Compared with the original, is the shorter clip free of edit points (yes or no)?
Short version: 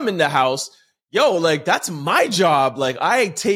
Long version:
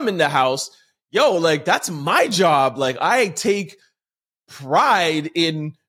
yes